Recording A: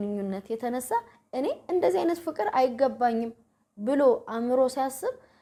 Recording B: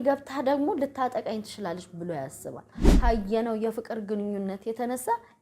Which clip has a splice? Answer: B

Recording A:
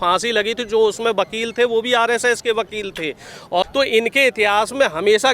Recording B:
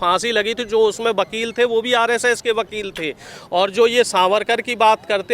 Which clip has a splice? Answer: A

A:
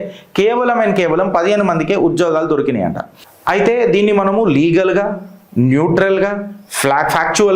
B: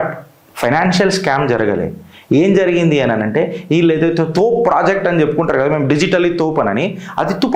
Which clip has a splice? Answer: A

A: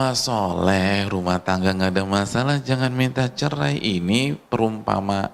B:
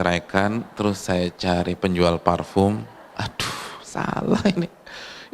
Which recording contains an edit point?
B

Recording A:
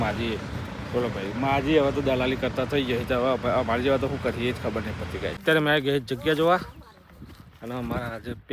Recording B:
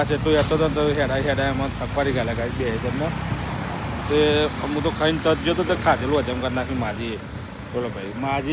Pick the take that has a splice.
A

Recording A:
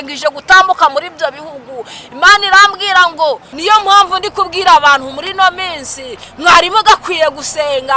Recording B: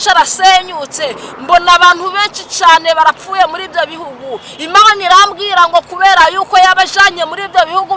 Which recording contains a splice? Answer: A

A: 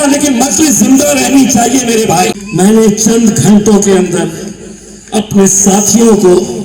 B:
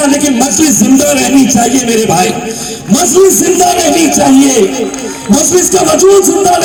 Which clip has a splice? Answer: A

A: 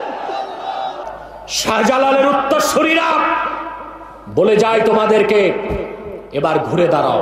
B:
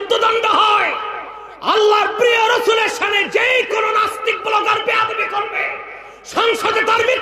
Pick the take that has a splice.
A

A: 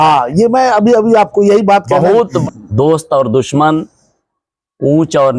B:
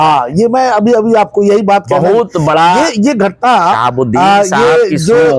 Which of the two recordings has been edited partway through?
A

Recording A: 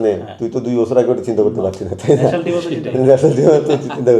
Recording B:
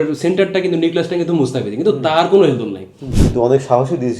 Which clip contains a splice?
B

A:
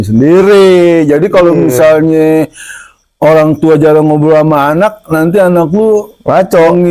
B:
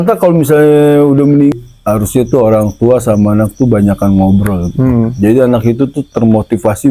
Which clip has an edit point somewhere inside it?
B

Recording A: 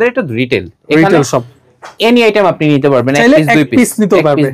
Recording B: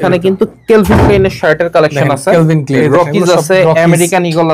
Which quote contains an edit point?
B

